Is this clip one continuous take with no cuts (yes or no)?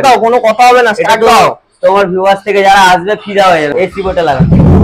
no